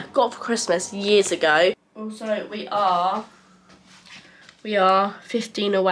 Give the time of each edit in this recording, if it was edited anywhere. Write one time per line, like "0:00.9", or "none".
0:01.8

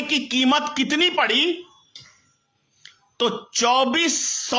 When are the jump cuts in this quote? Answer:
0:01.1

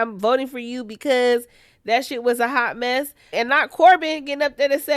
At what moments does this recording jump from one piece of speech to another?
0:03.3

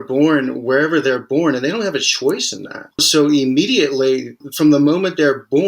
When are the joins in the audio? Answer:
0:03.1
0:04.4

